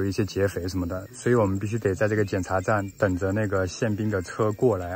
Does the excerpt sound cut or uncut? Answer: uncut